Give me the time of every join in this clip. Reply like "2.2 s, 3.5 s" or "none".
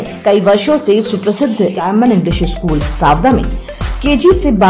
1.8 s